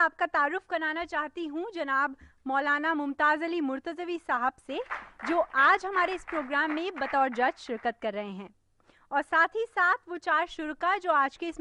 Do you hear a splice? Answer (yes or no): yes